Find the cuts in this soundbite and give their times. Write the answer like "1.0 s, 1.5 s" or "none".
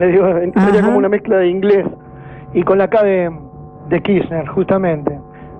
2.5 s